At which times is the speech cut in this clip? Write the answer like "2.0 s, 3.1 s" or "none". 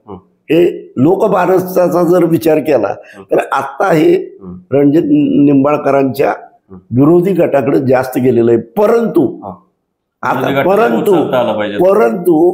none

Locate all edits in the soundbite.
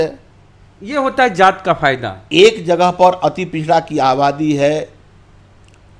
2.1 s

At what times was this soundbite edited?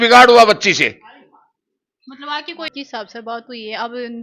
2.7 s

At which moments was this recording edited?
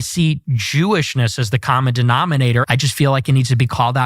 2.6 s

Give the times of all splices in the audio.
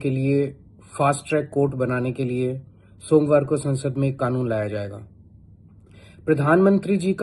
none

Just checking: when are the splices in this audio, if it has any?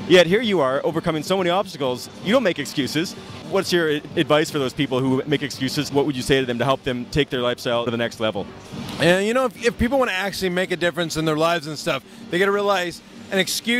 10.4 s

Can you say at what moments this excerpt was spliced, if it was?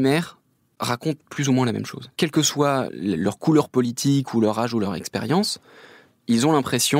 2.0 s

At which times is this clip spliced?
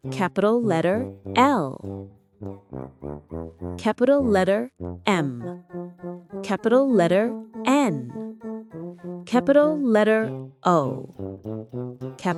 none

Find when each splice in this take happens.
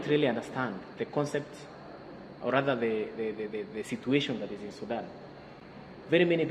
none

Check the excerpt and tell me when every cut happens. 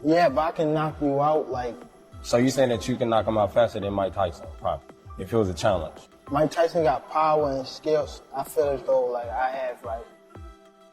10.0 s

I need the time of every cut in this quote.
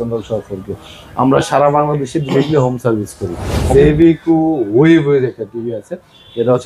3.6 s

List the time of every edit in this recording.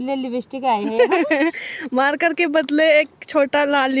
none

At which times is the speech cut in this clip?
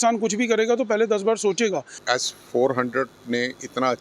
2.0 s

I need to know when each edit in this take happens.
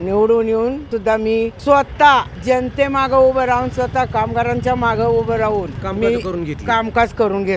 1.1 s, 2.3 s, 5.8 s

